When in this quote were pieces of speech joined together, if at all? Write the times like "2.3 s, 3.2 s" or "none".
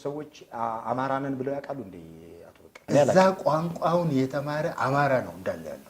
2.8 s